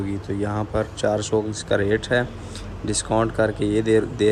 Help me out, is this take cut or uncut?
uncut